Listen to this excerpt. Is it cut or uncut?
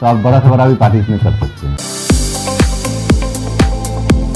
cut